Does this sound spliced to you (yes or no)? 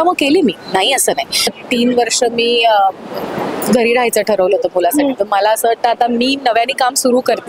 yes